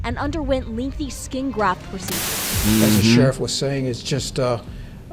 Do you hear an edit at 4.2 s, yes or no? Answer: no